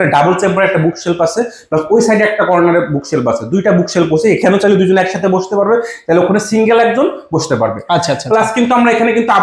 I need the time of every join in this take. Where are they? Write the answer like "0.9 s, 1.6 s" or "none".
none